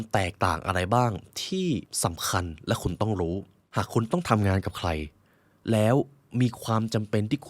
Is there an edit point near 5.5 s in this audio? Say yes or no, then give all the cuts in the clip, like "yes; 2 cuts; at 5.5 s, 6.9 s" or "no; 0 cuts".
no; 2 cuts; at 1.9 s, 3.6 s